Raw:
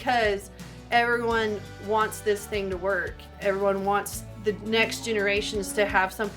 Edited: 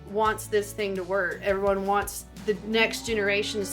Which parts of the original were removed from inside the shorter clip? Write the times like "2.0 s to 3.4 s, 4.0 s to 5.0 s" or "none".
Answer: 3.1 s to 3.3 s